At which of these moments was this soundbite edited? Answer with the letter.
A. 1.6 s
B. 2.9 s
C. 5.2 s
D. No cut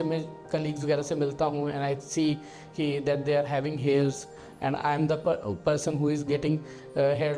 D